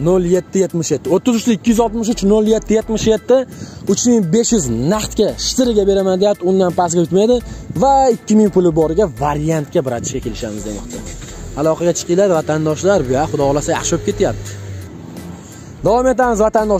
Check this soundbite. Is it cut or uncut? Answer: uncut